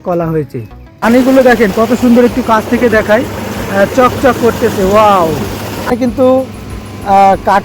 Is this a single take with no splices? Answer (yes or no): no